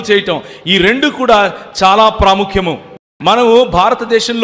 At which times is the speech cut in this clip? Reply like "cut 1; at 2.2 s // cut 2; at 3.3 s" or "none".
cut 1; at 2.9 s

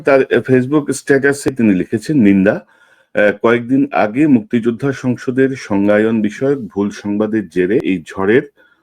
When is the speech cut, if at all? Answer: cut 1; at 1.5 s // cut 2; at 7.8 s

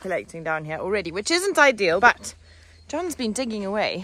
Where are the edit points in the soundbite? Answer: cut 1; at 2.0 s

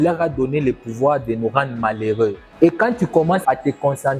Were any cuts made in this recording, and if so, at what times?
cut 1; at 2.5 s

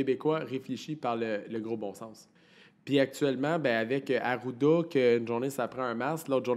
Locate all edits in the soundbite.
none

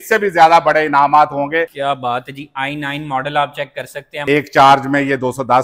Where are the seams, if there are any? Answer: cut 1; at 1.7 s // cut 2; at 4.2 s

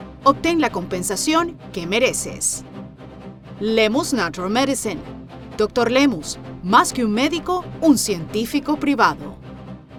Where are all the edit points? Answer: none

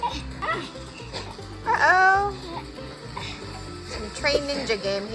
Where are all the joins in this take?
none

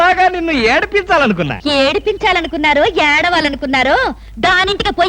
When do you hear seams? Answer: cut 1; at 1.6 s

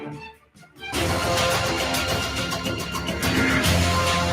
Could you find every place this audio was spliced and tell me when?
cut 1; at 0.9 s

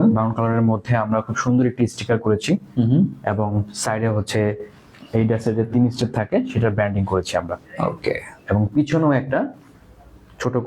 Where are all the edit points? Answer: none

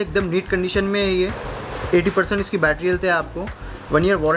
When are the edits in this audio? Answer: cut 1; at 1.5 s

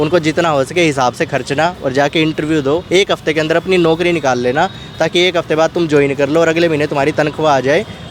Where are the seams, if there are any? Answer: none

